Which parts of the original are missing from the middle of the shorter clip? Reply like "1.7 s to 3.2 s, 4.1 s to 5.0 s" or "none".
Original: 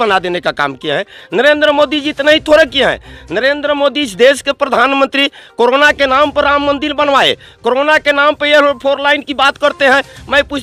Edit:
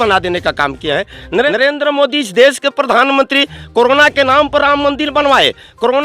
1.5 s to 3.3 s